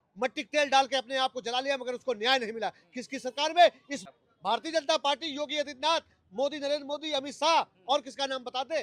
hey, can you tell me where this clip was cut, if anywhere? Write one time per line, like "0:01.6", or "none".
0:03.9